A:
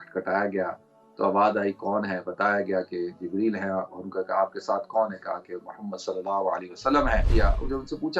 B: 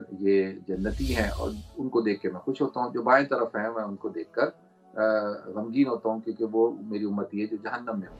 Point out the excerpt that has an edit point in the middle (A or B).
A